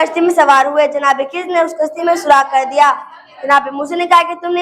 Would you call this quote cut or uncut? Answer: uncut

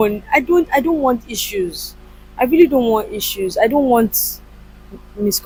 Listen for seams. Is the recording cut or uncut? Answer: uncut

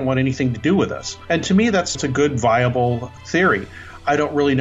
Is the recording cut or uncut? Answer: cut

